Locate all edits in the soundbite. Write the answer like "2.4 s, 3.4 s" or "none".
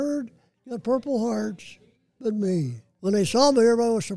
2.8 s